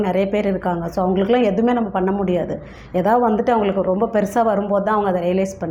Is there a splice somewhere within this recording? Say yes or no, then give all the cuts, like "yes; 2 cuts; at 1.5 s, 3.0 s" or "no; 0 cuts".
no; 0 cuts